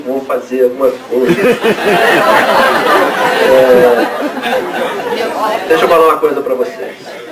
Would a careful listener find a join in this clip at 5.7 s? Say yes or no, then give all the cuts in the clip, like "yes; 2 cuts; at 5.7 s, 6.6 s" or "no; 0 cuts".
yes; 1 cut; at 5.7 s